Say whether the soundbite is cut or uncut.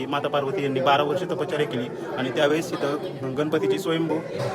uncut